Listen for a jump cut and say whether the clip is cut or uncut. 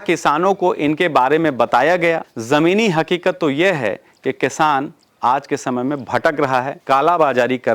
cut